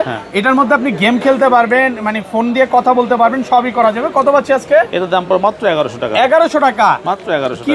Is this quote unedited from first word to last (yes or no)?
yes